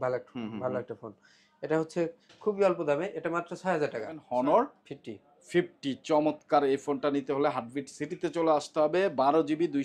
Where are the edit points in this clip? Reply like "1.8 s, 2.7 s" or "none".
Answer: 4.2 s